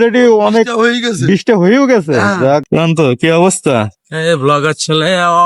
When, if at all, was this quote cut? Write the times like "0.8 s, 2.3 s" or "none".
2.6 s